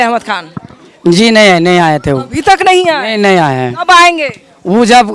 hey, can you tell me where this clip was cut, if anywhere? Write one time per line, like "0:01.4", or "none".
none